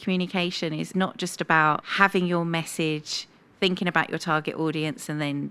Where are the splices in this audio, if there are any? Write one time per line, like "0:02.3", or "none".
0:00.9
0:01.9